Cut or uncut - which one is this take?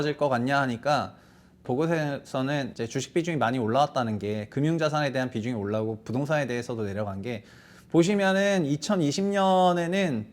cut